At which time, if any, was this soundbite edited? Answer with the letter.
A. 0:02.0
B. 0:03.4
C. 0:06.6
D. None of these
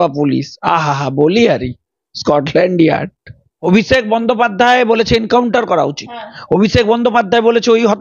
B